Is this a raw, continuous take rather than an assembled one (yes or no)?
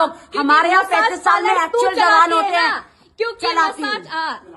yes